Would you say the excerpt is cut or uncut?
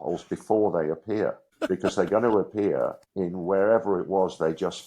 cut